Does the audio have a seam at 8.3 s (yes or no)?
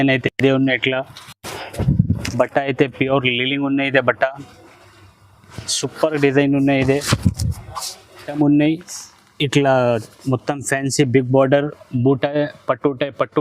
yes